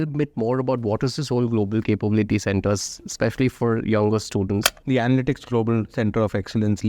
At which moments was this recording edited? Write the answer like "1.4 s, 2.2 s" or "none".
4.7 s